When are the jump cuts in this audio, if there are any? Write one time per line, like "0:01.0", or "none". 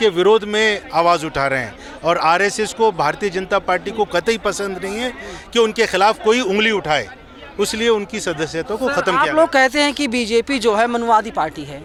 none